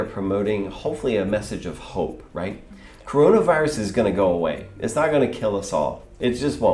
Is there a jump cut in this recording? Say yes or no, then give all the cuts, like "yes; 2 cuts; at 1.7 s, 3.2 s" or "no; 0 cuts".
no; 0 cuts